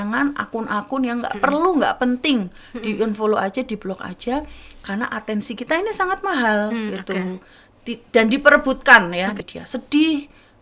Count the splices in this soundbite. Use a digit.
1